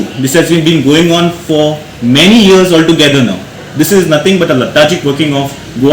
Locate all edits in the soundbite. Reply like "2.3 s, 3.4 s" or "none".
none

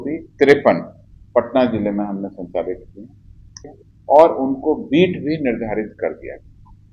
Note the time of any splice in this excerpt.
3.7 s

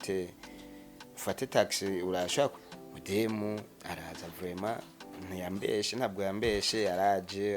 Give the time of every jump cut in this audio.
2.5 s

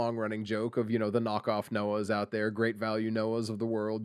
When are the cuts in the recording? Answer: none

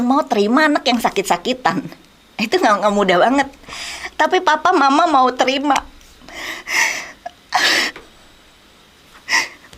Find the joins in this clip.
none

